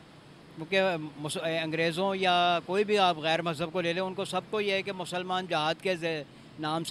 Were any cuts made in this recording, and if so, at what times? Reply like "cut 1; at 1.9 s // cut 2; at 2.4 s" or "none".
none